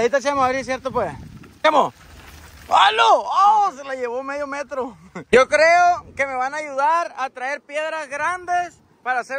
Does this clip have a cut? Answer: yes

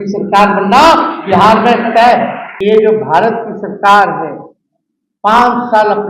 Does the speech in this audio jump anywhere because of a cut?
yes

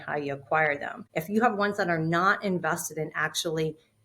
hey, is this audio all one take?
no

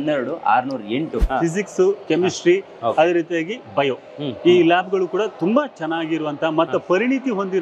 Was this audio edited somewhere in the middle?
yes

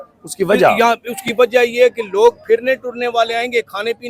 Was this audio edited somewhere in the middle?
no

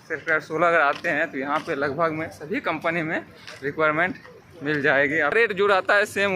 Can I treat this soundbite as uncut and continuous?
no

